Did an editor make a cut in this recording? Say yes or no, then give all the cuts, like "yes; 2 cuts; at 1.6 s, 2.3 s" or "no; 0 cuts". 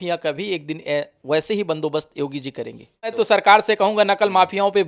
yes; 1 cut; at 3.1 s